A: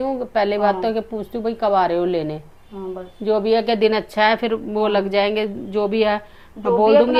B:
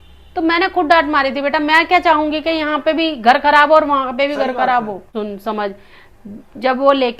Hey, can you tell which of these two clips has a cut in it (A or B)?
B